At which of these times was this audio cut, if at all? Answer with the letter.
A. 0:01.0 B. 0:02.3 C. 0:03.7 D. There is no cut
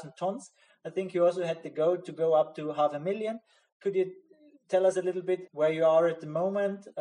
D